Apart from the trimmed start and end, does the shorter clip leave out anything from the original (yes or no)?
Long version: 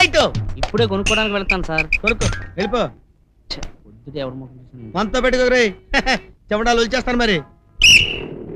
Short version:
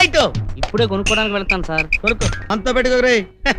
yes